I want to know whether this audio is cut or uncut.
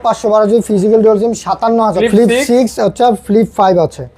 cut